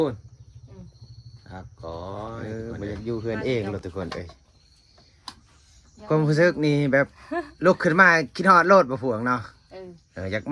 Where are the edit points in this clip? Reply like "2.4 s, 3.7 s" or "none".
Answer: 2.4 s